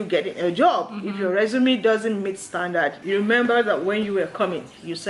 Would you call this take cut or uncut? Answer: cut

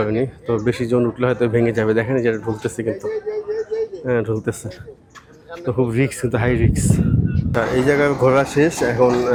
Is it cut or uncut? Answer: uncut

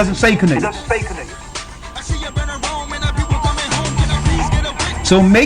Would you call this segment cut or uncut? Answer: uncut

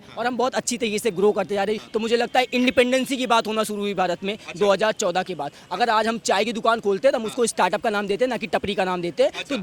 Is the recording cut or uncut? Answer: cut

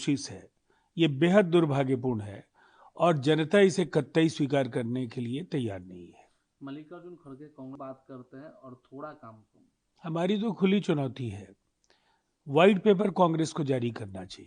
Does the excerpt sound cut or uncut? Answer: cut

